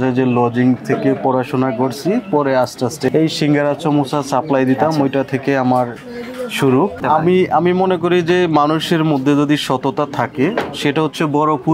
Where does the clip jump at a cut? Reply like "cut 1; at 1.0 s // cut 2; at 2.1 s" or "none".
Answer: cut 1; at 3.1 s // cut 2; at 7.0 s